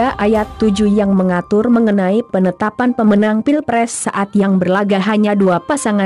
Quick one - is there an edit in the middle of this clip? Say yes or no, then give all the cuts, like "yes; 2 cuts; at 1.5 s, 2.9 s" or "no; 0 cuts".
yes; 1 cut; at 1.1 s